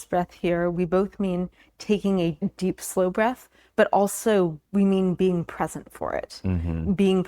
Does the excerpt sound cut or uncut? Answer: cut